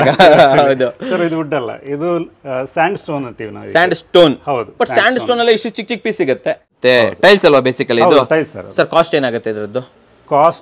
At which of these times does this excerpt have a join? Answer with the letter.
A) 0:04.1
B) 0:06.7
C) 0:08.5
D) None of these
B